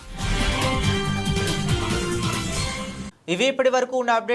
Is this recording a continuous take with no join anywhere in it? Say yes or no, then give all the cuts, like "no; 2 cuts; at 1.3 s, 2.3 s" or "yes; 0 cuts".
yes; 0 cuts